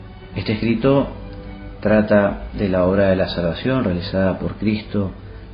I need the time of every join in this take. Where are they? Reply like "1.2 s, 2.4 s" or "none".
2.5 s